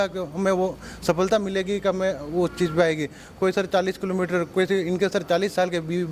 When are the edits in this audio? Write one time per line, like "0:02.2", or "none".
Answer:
none